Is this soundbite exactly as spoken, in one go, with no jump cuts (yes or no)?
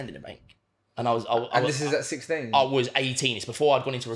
yes